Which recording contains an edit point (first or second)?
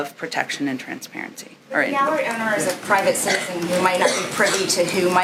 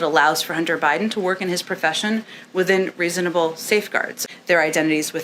second